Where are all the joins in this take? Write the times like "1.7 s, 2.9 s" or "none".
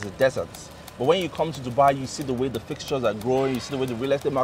none